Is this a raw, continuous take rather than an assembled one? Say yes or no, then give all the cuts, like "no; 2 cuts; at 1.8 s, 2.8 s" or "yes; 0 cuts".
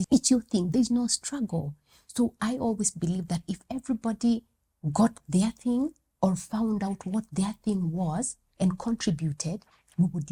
yes; 0 cuts